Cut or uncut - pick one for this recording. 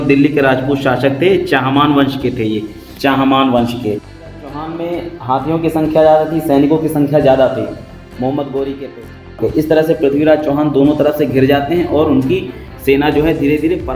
cut